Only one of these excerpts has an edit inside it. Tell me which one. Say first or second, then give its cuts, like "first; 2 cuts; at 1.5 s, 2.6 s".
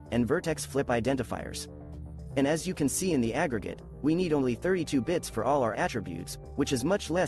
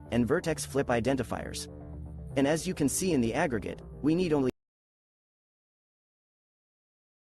first; 1 cut; at 4.5 s